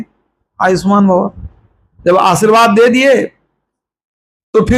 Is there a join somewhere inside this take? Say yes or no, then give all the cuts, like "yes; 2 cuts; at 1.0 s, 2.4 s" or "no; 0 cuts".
no; 0 cuts